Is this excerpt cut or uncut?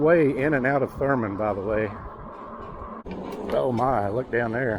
cut